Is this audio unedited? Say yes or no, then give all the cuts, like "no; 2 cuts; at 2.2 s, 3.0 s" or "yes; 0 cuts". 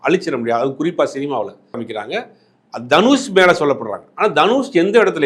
no; 1 cut; at 1.9 s